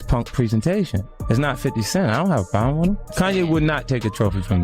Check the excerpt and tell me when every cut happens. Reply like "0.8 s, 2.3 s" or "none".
1.1 s, 3.1 s

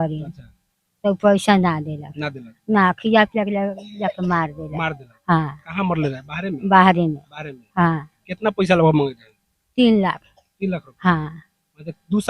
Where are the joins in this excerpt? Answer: none

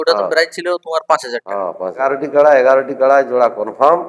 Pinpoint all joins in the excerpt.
2.0 s

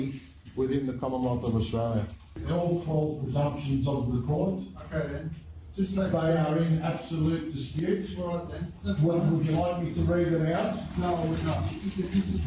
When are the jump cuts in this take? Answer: 2.4 s

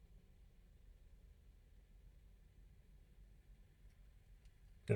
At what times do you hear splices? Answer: none

